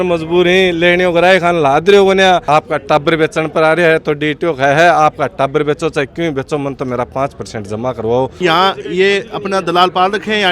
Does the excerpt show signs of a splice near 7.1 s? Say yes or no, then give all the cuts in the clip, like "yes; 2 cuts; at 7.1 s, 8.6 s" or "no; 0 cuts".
no; 2 cuts; at 2.4 s, 8.4 s